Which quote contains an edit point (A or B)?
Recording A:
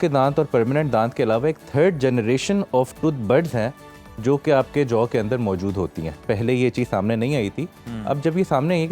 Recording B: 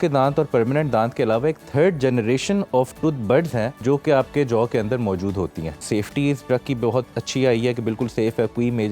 B